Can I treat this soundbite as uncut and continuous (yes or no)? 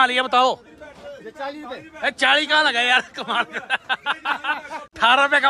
yes